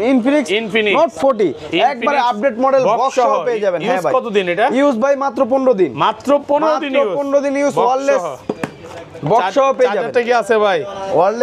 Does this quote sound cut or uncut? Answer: uncut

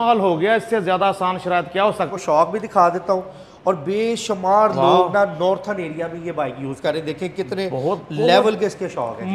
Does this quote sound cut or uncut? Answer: cut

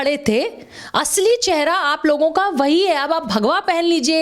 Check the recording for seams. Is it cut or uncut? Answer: uncut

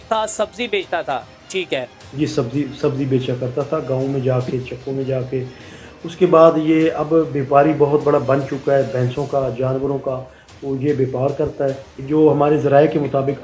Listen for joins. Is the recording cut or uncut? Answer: cut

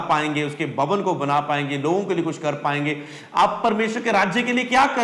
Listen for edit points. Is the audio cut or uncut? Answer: uncut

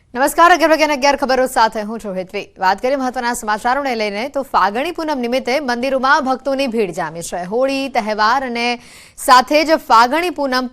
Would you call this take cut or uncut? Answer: cut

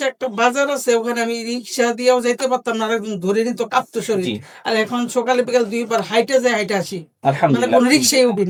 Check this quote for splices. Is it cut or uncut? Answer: uncut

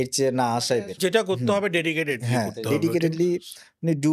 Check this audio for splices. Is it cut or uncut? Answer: cut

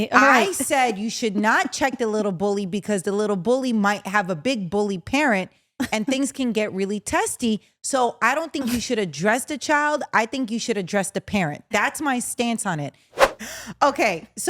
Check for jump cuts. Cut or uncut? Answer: cut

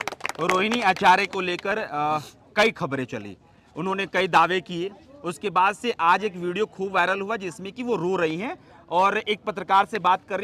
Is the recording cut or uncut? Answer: uncut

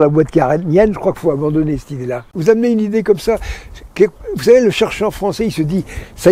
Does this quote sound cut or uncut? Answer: cut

